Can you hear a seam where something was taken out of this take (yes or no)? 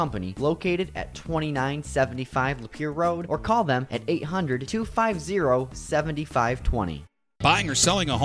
yes